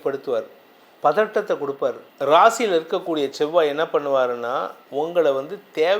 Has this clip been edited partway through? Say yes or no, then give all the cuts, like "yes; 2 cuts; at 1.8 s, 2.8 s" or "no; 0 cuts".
yes; 1 cut; at 2.1 s